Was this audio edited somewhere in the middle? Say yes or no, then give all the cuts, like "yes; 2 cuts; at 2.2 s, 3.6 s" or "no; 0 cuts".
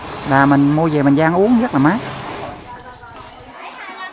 yes; 1 cut; at 2.0 s